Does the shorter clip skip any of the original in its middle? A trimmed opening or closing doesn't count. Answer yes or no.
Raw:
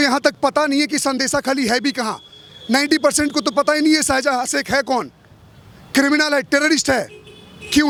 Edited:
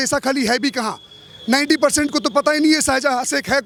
no